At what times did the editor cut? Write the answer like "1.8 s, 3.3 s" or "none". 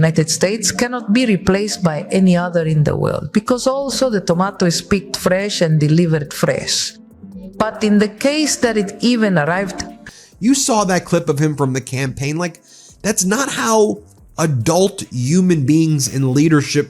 3.2 s, 10.0 s